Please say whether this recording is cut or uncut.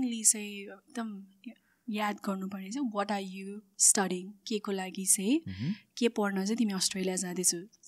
uncut